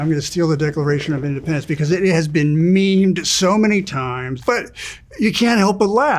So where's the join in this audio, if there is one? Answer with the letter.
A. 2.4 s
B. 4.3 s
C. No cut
B